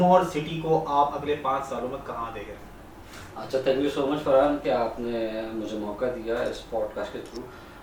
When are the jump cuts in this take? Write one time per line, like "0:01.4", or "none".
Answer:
none